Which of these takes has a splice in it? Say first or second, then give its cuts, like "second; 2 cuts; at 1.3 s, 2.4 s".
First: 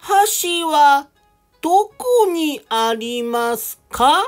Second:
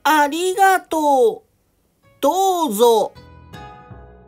second; 1 cut; at 3.2 s